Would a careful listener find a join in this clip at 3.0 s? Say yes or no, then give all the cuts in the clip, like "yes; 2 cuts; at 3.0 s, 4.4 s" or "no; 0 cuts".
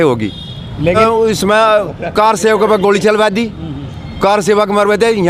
no; 1 cut; at 1.0 s